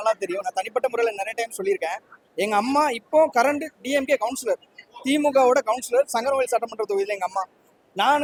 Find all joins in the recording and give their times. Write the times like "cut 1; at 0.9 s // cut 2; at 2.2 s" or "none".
none